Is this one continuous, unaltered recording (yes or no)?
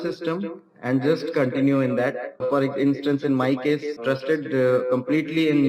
no